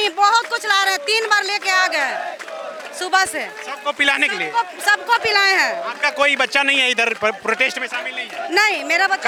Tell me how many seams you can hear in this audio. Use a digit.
0